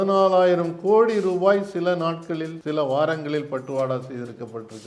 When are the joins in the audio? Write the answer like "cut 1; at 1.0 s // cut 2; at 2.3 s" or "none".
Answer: cut 1; at 2.5 s